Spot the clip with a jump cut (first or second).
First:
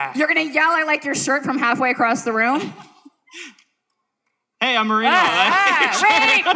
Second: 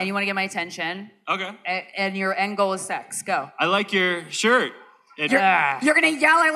second